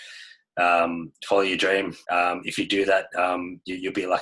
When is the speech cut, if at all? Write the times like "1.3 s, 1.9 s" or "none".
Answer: 2.0 s